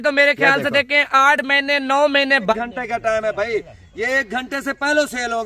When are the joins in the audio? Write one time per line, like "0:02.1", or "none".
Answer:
0:02.5

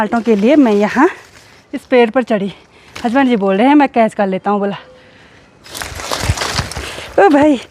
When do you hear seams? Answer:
0:05.7

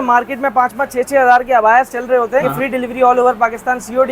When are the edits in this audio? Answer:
0:02.5

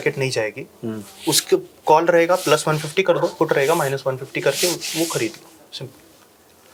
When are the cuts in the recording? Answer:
none

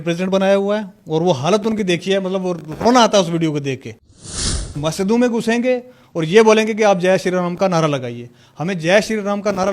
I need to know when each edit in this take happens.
0:04.2

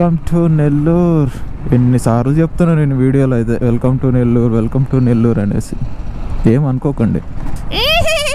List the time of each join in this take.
none

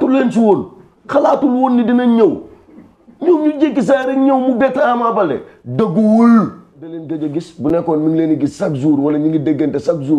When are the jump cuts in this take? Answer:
0:07.0

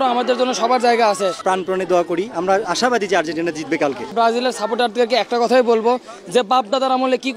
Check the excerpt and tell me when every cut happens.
0:01.4
0:04.1

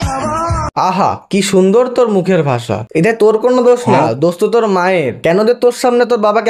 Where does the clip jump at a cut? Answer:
none

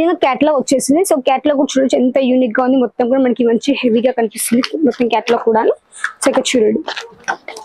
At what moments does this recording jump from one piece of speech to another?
none

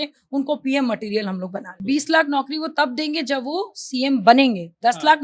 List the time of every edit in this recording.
0:01.7

